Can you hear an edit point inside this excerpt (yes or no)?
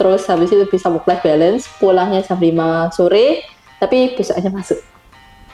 no